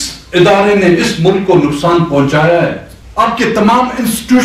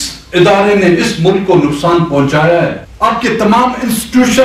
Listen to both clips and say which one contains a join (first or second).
second